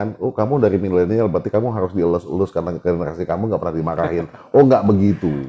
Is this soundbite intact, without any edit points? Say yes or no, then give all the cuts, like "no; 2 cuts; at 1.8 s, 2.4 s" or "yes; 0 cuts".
yes; 0 cuts